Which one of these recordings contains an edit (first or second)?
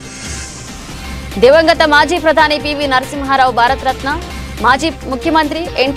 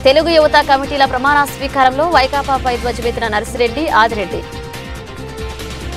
first